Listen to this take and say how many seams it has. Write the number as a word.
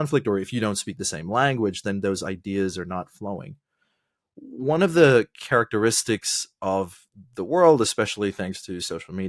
zero